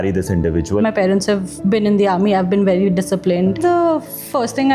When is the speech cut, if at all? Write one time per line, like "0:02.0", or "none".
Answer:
0:00.8
0:03.6

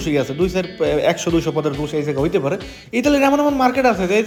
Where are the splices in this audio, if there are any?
none

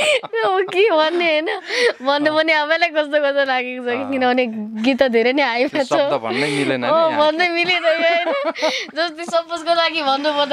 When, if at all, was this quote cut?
none

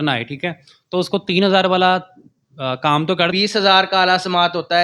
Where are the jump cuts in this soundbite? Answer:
0:03.3

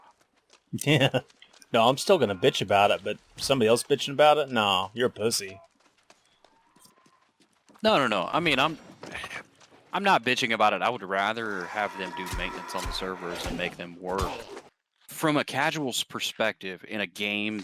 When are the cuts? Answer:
0:14.6

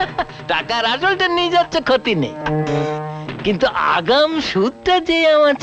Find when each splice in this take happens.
none

